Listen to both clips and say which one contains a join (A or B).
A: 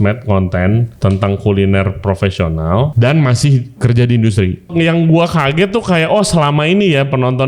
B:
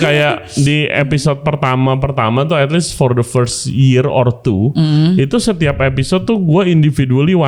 A